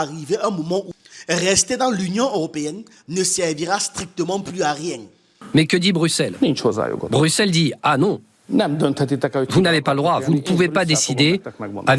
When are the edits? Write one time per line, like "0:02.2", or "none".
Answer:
0:05.4